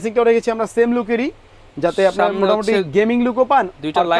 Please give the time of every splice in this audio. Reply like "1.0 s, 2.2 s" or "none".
none